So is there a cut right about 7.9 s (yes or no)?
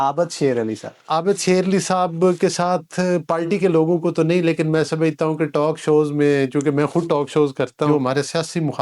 yes